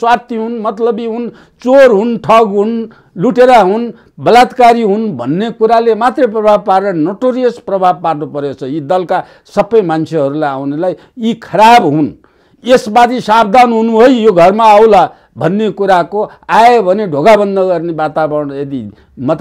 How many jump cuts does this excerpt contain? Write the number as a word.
zero